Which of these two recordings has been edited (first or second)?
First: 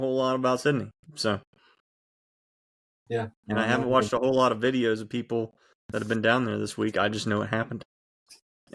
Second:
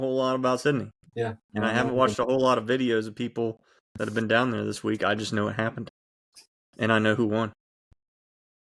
second